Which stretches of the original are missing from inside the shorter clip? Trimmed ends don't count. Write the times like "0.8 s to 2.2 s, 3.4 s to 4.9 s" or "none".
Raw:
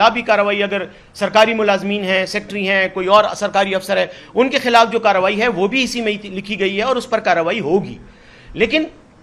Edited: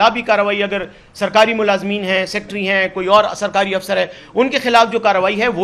none